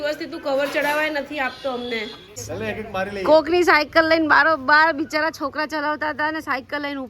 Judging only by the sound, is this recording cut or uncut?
cut